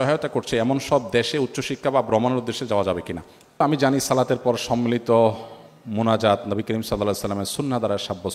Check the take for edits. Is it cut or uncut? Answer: cut